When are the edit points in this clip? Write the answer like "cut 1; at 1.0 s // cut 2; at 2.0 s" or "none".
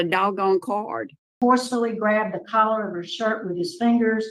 cut 1; at 1.3 s

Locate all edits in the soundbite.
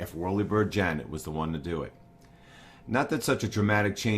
cut 1; at 1.2 s

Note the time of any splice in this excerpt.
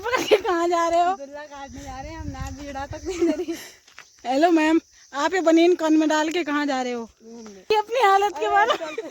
cut 1; at 7.7 s

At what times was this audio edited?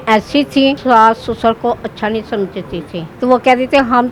cut 1; at 0.8 s // cut 2; at 3.1 s

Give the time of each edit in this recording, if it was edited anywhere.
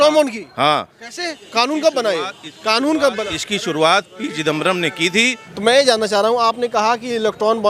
cut 1; at 5.4 s

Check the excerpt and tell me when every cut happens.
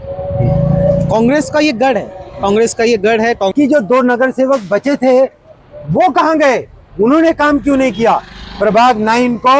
cut 1; at 3.5 s

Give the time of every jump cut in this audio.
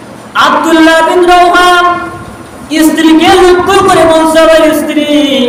none

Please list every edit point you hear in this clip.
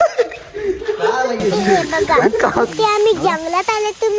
cut 1; at 2.7 s

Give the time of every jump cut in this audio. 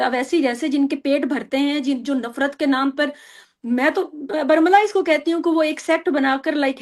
none

